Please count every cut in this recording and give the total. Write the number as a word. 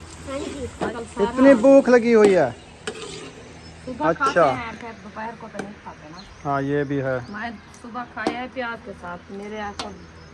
one